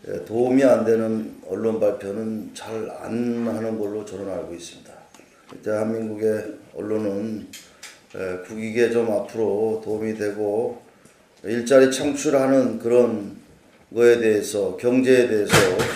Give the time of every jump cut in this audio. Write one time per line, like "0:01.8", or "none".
0:11.6